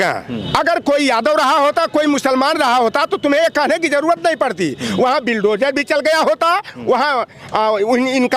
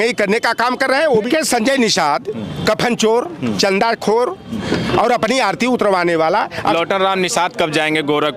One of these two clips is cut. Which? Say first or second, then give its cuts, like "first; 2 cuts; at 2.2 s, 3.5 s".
second; 2 cuts; at 1.3 s, 6.7 s